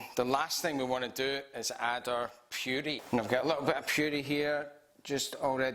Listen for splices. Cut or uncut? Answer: cut